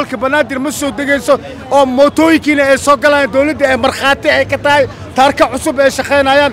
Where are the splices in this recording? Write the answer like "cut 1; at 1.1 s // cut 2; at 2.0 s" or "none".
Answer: none